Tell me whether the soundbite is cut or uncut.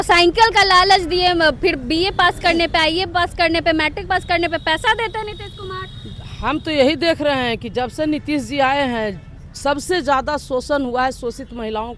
uncut